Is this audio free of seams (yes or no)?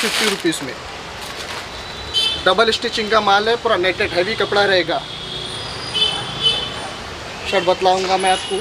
yes